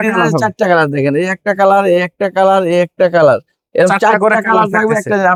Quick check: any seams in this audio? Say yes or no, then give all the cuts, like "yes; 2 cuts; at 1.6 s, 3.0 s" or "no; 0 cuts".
no; 0 cuts